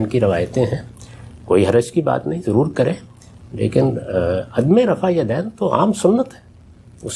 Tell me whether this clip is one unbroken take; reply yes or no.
yes